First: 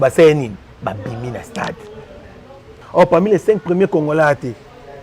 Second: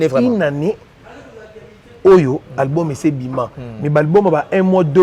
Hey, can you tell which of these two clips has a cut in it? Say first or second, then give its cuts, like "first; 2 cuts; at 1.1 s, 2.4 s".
first; 1 cut; at 2.7 s